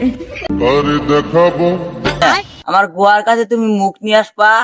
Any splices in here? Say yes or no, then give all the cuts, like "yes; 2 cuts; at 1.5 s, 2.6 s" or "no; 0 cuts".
yes; 1 cut; at 2.2 s